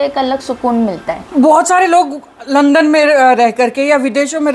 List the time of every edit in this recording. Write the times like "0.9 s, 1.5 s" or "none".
1.2 s